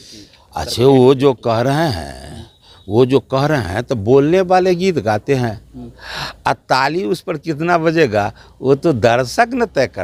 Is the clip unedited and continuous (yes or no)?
yes